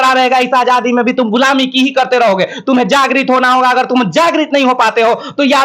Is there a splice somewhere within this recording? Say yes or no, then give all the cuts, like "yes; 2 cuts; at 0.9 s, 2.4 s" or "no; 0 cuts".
no; 0 cuts